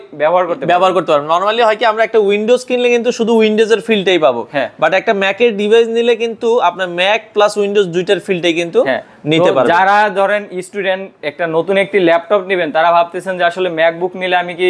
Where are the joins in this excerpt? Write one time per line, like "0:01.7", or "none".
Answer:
none